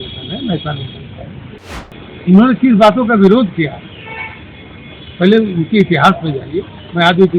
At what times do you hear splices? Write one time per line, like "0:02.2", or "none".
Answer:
0:01.9